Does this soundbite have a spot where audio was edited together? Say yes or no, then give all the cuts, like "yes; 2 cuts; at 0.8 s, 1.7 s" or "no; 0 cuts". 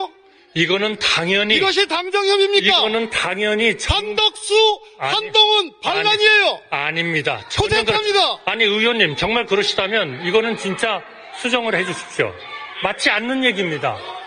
no; 0 cuts